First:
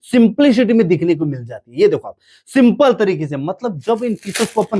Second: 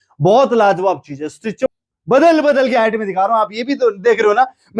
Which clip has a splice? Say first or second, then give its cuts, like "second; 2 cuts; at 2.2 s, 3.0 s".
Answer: second; 1 cut; at 1.6 s